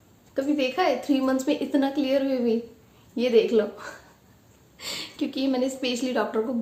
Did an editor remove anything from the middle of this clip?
no; 0 cuts

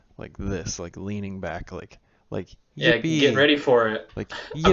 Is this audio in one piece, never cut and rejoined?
yes; 0 cuts

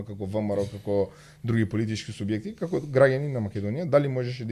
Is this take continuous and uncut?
yes; 0 cuts

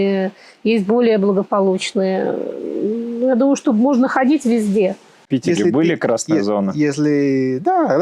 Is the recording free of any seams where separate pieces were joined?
no; 1 cut; at 5.1 s

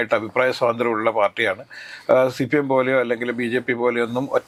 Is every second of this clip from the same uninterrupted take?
yes; 0 cuts

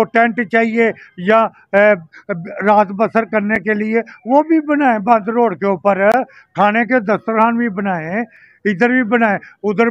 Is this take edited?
no; 0 cuts

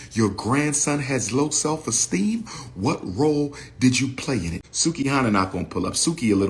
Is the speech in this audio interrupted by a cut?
yes; 1 cut; at 4.6 s

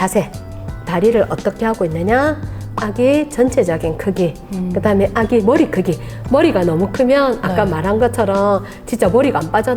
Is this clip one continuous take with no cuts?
yes; 0 cuts

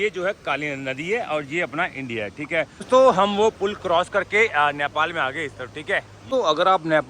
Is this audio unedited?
no; 2 cuts; at 2.8 s, 6.2 s

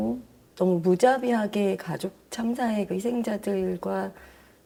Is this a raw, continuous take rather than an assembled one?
yes; 0 cuts

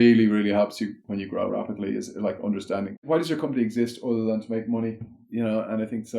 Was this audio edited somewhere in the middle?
yes; 3 cuts; at 1.3 s, 3.0 s, 5.2 s

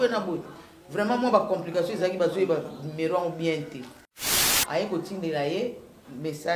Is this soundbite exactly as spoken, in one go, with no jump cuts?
no; 1 cut; at 4.5 s

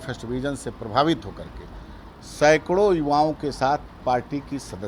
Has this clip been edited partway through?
no; 0 cuts

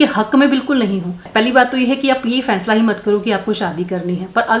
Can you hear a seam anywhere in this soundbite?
no; 0 cuts

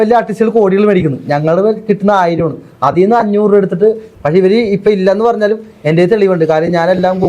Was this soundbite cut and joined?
yes; 1 cut; at 4.1 s

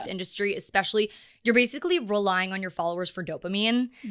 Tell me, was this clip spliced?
no; 0 cuts

